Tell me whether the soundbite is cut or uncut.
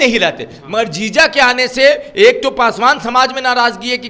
uncut